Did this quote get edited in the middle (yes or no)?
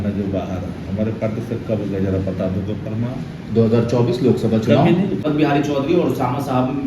yes